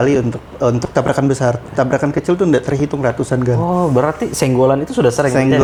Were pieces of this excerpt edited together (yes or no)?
no